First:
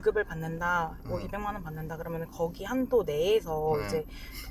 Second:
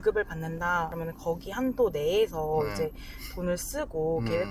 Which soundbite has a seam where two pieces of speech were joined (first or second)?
second